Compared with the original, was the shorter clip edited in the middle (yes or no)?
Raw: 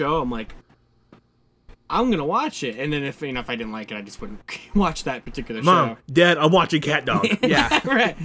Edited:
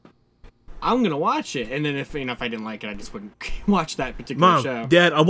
yes